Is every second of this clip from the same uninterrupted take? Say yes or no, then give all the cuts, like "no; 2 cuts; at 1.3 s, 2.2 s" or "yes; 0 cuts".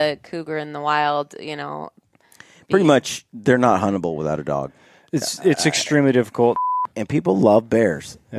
no; 1 cut; at 6.6 s